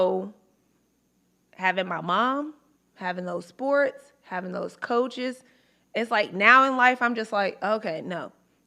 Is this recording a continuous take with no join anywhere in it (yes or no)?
yes